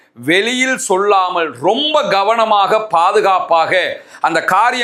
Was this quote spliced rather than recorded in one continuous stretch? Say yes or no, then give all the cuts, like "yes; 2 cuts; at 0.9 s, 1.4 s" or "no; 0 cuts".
no; 0 cuts